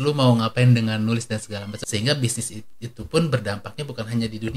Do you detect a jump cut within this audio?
yes; 1 cut; at 1.7 s

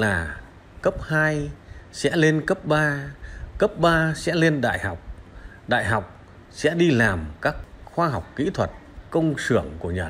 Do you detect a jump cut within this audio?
yes; 2 cuts; at 7.6 s, 9.0 s

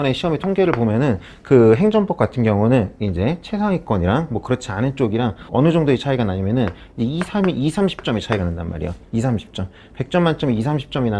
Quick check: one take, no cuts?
yes; 0 cuts

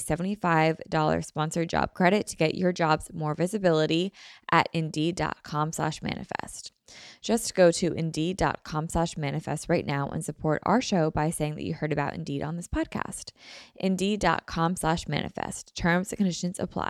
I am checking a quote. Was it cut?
no; 0 cuts

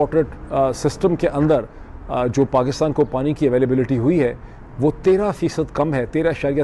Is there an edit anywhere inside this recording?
no; 0 cuts

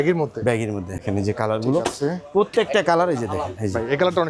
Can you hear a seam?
yes; 1 cut; at 1.0 s

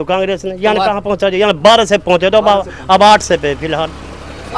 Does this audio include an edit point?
no; 0 cuts

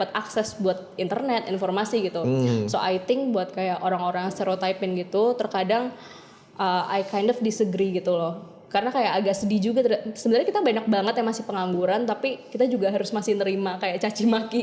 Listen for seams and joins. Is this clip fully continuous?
yes; 0 cuts

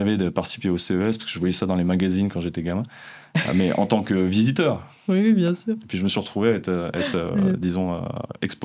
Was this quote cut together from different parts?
no; 0 cuts

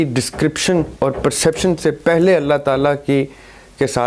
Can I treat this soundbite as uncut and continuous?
yes; 0 cuts

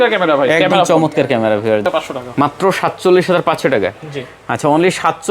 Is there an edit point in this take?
yes; 1 cut; at 1.9 s

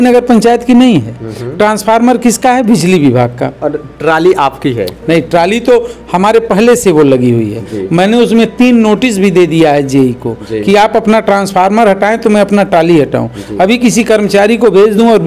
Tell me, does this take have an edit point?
no; 0 cuts

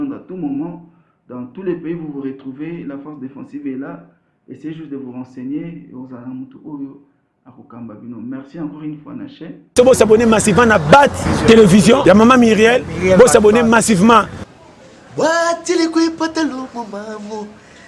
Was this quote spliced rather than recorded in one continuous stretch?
yes; 1 cut; at 9.6 s

